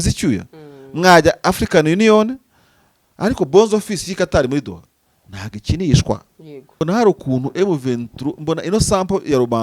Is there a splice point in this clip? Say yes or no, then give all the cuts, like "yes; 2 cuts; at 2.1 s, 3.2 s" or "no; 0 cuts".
yes; 1 cut; at 6.8 s